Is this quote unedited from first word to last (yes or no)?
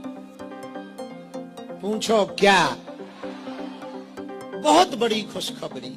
yes